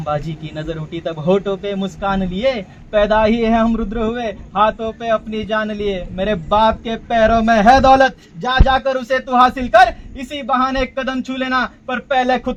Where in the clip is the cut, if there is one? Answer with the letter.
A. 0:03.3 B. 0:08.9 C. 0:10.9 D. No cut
D